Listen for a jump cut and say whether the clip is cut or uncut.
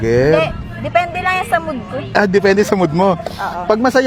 uncut